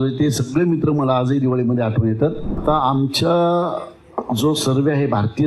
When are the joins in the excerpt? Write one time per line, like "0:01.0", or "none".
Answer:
0:02.6